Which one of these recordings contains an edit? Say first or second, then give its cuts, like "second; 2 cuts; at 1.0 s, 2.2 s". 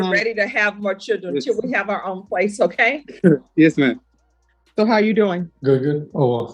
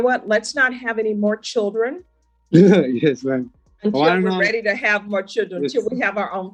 first; 1 cut; at 4.7 s